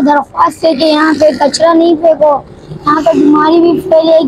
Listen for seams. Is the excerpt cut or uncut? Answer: uncut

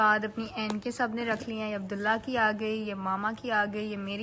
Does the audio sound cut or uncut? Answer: uncut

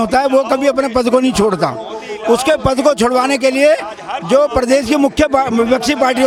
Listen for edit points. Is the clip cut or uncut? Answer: uncut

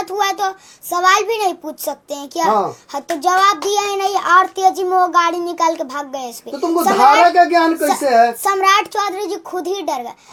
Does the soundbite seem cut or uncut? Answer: uncut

